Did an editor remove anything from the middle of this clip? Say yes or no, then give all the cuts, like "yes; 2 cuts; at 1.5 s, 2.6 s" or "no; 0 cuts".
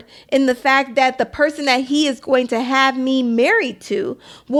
no; 0 cuts